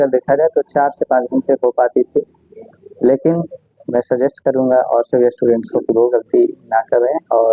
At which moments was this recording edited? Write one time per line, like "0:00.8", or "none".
none